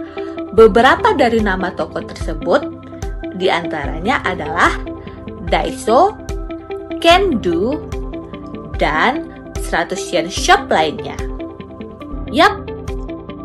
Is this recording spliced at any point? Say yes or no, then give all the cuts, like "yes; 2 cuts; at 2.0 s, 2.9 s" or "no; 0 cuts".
yes; 1 cut; at 12.1 s